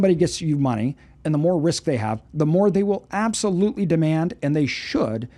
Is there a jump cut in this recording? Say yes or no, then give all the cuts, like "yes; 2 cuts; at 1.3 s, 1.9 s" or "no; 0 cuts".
no; 0 cuts